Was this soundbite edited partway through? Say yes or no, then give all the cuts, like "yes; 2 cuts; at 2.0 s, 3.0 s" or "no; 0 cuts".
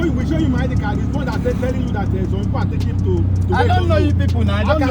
no; 0 cuts